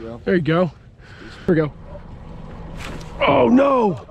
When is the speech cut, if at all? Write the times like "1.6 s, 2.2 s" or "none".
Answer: 1.5 s